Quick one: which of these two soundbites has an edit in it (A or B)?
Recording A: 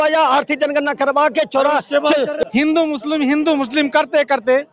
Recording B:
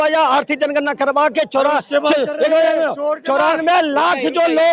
A